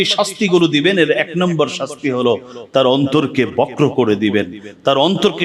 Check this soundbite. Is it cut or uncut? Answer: uncut